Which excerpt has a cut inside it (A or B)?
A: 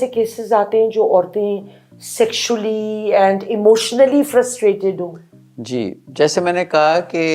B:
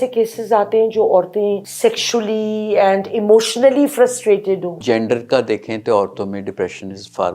B